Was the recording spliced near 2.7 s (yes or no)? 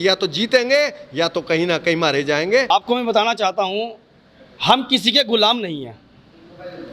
yes